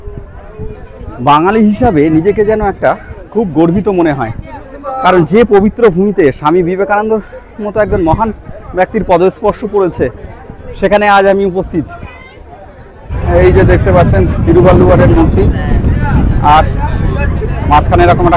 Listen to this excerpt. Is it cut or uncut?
cut